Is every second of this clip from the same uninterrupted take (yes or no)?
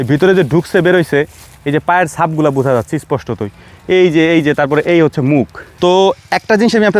no